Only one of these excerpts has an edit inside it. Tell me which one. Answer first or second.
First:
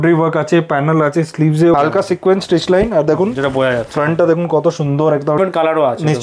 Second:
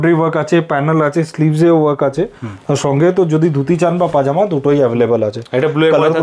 first